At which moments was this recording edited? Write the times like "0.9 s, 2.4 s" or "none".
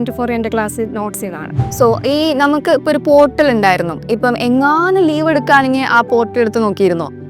none